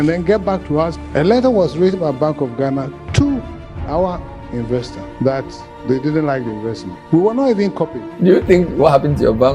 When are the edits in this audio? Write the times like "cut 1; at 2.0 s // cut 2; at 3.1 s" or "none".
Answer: cut 1; at 1.0 s // cut 2; at 5.0 s // cut 3; at 6.9 s // cut 4; at 8.0 s